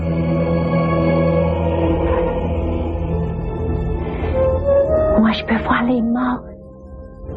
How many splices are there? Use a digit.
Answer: 1